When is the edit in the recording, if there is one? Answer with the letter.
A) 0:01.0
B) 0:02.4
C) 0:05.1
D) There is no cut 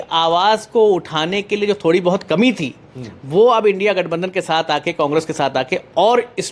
D